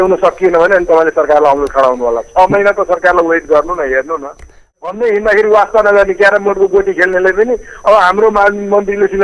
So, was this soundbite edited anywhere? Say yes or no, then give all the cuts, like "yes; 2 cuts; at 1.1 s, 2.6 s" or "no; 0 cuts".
yes; 1 cut; at 4.6 s